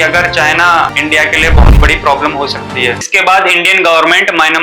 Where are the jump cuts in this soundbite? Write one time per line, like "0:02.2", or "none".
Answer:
0:00.9
0:03.1